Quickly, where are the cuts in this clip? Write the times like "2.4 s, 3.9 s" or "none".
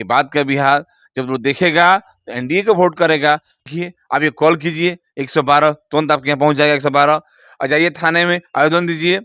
3.7 s